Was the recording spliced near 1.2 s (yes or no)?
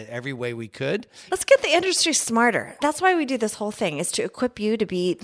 yes